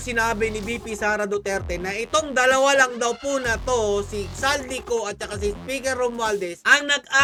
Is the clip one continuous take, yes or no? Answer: yes